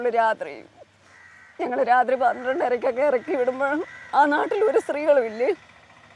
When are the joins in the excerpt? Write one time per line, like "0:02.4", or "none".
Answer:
none